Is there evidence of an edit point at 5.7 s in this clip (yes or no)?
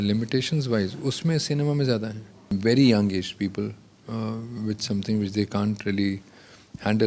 no